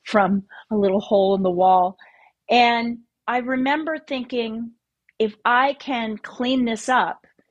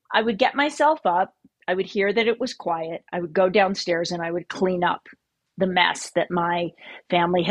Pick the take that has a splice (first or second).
first